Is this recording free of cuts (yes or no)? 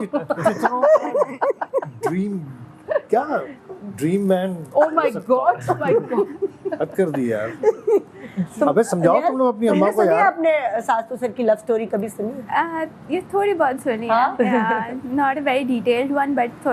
yes